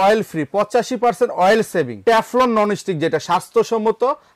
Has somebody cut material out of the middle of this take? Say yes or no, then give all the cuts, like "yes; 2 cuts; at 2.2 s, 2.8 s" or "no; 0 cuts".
yes; 1 cut; at 2.0 s